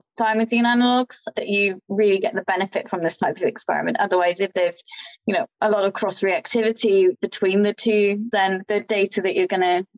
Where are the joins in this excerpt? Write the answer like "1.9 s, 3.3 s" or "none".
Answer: 8.6 s